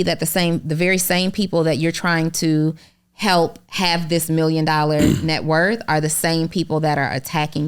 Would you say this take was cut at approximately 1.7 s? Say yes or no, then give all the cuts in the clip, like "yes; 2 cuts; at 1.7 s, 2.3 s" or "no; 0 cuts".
no; 0 cuts